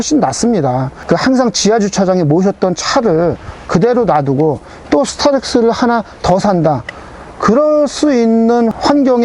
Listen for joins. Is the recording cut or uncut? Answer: cut